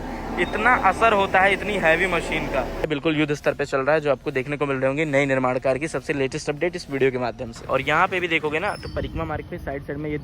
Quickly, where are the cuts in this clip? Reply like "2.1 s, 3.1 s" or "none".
2.9 s, 7.6 s

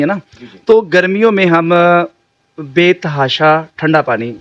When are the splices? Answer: none

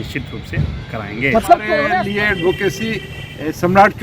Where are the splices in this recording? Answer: 2.0 s

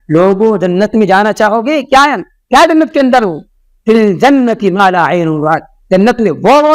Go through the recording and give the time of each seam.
none

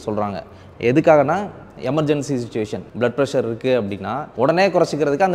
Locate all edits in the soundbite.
2.8 s, 4.2 s

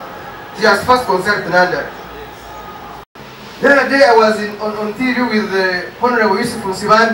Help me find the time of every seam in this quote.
3.1 s

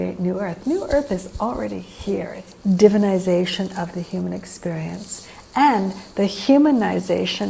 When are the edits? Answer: 2.4 s

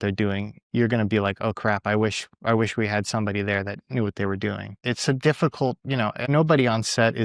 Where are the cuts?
4.7 s, 6.2 s

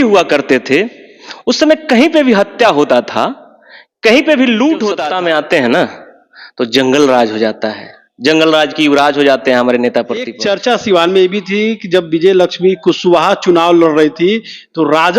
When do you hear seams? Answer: 5.0 s, 10.4 s

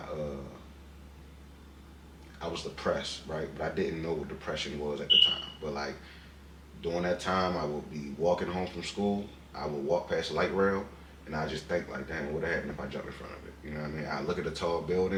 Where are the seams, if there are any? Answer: none

